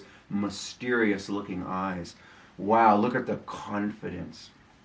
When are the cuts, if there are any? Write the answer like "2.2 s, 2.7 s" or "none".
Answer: none